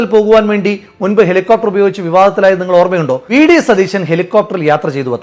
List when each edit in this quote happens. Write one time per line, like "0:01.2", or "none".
0:03.2